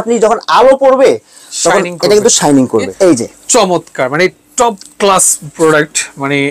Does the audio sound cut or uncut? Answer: cut